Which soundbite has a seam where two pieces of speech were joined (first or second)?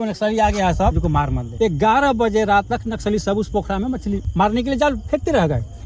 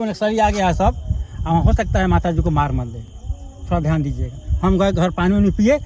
first